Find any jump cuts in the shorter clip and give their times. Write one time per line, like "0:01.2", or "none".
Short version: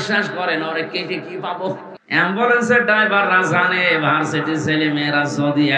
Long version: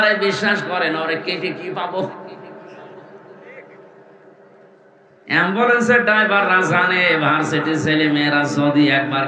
0:01.9